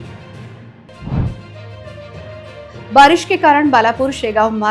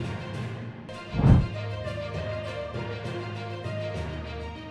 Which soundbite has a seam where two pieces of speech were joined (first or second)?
first